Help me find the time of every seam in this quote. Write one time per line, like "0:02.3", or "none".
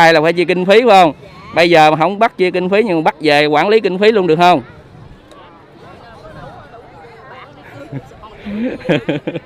none

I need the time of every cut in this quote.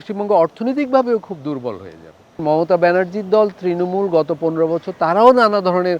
0:02.4

